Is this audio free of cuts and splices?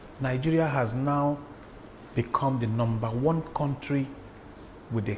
yes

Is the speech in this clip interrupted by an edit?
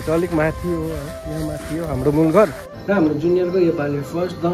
yes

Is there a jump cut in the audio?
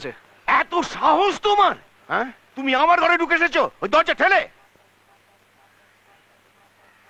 no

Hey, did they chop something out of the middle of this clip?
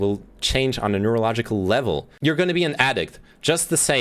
no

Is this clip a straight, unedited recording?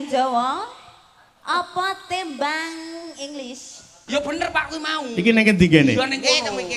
no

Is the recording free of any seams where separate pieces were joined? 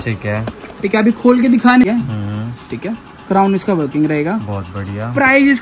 no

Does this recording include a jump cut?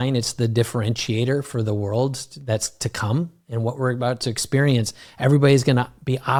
no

